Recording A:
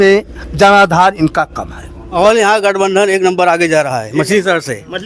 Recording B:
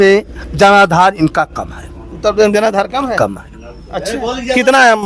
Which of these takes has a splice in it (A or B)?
A